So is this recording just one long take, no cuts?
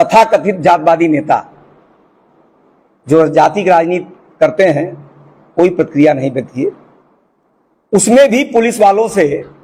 yes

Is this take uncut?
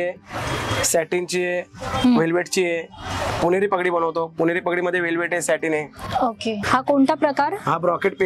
yes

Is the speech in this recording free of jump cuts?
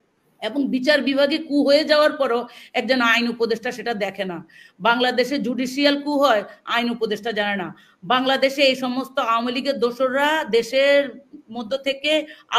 yes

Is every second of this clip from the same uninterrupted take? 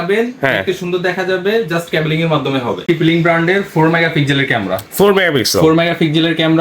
no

